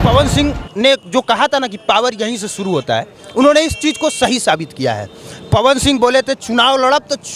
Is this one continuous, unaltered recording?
yes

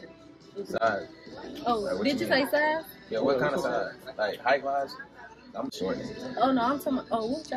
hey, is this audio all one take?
yes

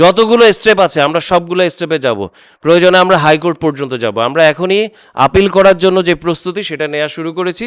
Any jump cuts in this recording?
no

